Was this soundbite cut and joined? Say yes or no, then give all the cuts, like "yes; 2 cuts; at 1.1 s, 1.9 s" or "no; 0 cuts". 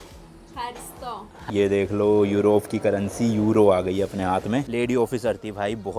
yes; 2 cuts; at 1.4 s, 4.6 s